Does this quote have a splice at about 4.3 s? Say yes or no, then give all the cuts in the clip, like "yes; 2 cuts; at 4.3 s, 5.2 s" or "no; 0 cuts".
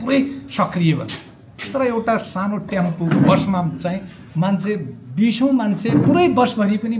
no; 0 cuts